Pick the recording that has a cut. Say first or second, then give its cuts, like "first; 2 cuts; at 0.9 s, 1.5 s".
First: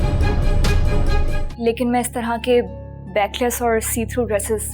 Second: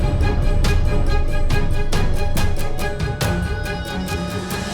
first; 1 cut; at 1.4 s